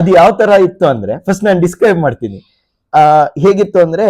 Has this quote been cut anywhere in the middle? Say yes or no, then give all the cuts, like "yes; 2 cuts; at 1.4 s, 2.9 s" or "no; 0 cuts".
no; 0 cuts